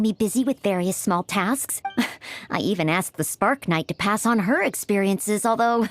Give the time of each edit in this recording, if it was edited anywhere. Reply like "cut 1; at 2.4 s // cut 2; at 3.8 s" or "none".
cut 1; at 1.8 s